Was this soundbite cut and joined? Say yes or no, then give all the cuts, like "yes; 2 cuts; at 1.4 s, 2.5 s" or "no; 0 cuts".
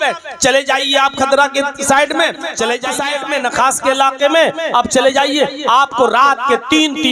yes; 1 cut; at 3.0 s